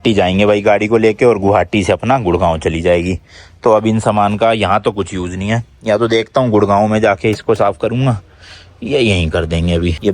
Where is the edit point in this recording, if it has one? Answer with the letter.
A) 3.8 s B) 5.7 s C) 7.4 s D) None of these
D